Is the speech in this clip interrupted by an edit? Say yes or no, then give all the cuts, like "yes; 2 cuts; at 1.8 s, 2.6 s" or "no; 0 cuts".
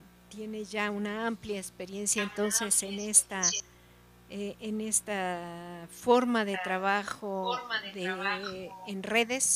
no; 0 cuts